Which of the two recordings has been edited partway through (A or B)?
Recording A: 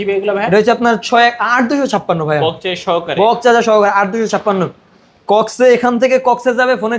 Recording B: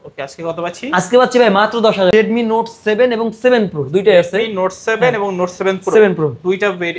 B